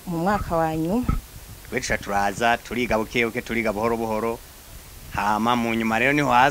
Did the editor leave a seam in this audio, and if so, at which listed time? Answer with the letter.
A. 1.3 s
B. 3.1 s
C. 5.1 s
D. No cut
A